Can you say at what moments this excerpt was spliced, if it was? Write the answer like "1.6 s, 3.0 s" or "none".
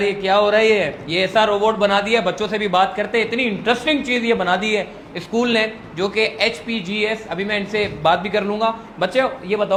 none